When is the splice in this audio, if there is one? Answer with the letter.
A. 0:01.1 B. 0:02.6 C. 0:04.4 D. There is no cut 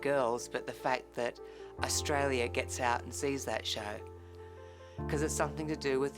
C